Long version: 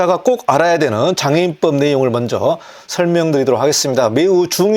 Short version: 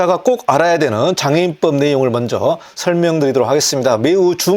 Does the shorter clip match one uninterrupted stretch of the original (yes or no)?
no